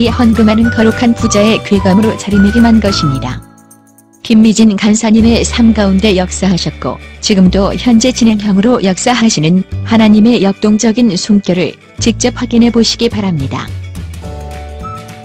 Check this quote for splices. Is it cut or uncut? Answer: cut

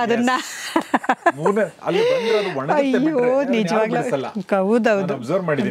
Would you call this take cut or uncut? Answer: uncut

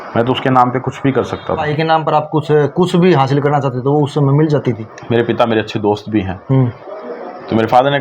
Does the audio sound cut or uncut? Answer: cut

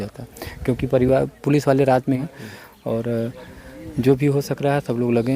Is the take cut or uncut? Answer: cut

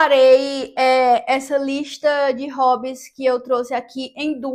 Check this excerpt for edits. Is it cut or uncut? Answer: uncut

